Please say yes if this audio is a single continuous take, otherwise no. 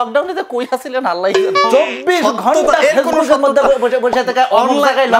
no